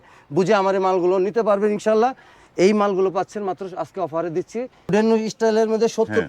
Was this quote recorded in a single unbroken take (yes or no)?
no